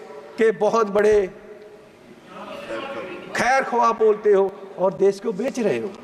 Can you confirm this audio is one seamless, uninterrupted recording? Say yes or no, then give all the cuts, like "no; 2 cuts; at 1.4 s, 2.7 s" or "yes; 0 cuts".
yes; 0 cuts